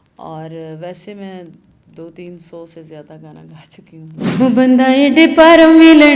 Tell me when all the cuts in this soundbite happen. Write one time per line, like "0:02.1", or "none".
0:04.3